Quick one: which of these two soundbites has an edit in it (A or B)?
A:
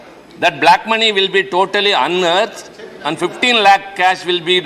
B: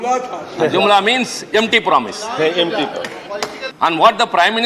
B